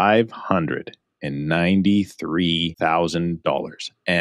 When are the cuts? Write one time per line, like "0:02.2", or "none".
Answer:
0:02.7